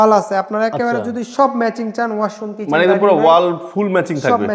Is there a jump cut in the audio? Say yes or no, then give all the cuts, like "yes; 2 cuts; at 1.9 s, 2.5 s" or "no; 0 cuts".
no; 0 cuts